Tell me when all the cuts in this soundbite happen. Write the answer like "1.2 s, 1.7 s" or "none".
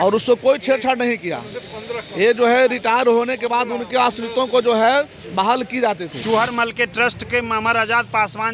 6.1 s

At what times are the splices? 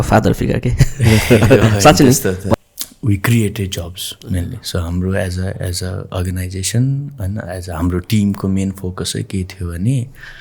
2.5 s

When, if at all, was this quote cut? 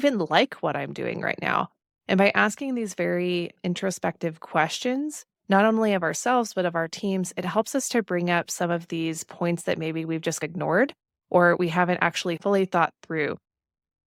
none

